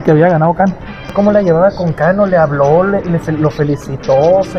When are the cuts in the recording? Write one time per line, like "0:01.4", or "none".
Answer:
0:01.1